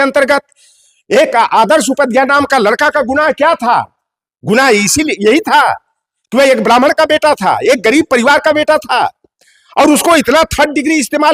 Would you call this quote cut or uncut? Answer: uncut